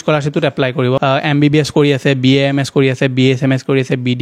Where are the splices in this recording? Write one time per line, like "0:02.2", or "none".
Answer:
0:01.0